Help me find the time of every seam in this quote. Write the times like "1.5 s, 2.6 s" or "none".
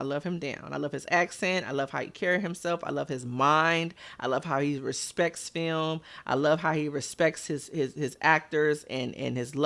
none